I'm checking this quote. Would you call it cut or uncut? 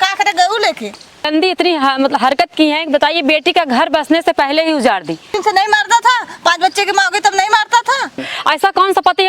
cut